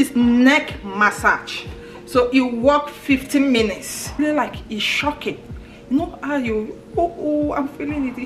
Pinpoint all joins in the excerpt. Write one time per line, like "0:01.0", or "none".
0:04.2

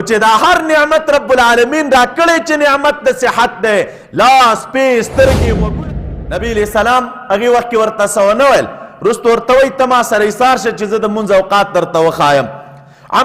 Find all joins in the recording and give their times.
0:05.7

